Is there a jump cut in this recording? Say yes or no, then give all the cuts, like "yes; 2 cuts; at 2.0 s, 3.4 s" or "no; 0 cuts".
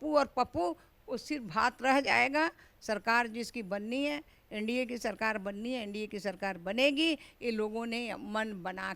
no; 0 cuts